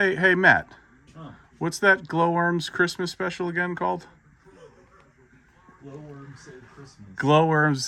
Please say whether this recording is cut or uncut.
uncut